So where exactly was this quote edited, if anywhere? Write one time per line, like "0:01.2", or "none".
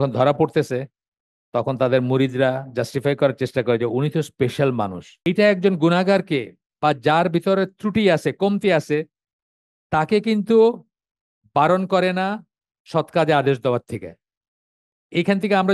0:05.1